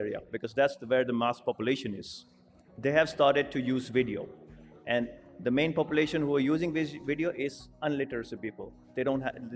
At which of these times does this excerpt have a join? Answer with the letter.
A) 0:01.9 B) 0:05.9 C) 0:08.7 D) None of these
D